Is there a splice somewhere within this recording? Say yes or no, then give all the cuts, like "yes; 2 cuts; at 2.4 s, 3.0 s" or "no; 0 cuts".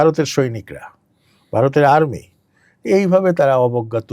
no; 0 cuts